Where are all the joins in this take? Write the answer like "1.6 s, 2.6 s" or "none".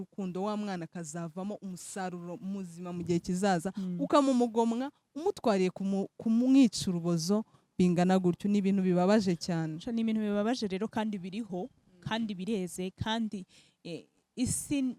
none